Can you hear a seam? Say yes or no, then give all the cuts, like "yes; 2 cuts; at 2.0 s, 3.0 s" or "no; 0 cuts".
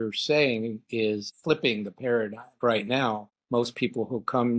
yes; 3 cuts; at 1.3 s, 2.6 s, 3.3 s